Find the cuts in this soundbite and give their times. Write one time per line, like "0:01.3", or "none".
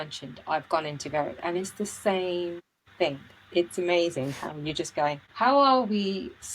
0:05.3